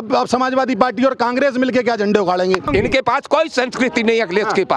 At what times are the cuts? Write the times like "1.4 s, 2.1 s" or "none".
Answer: 2.6 s